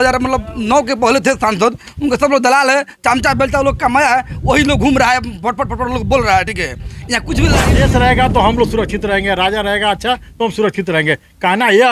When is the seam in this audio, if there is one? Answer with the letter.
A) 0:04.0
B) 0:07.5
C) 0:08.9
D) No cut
B